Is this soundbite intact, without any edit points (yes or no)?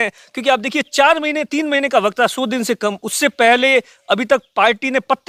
yes